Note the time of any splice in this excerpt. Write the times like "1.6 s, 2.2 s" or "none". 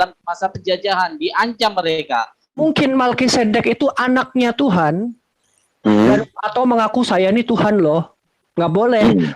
2.6 s